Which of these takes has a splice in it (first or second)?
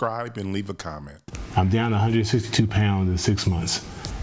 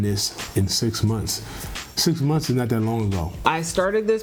first